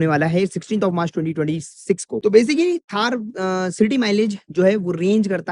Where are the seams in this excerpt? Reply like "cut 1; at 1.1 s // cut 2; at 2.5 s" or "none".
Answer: cut 1; at 2.2 s